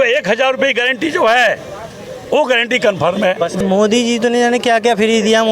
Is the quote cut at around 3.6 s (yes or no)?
yes